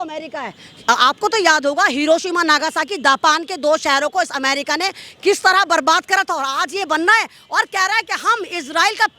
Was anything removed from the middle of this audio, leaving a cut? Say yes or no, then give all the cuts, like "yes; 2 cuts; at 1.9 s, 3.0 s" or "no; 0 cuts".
no; 0 cuts